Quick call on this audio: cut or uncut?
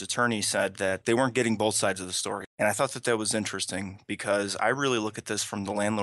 cut